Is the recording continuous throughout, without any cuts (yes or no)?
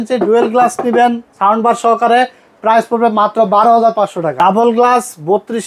no